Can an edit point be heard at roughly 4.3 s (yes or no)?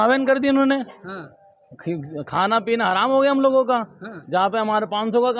no